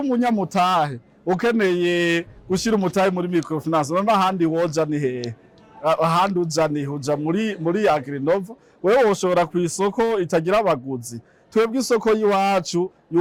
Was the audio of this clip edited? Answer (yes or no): no